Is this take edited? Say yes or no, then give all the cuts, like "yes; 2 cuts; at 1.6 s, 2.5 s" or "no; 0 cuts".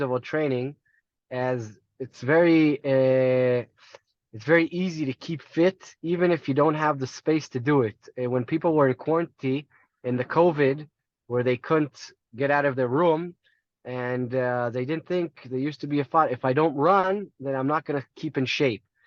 no; 0 cuts